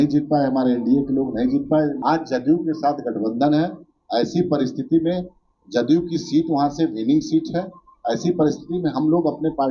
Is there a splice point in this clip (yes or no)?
yes